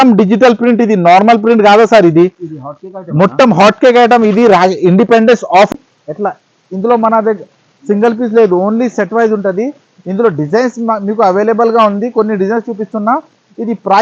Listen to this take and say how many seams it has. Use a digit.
1